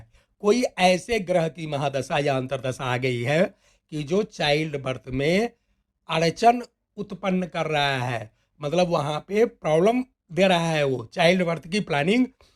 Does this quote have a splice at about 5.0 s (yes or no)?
no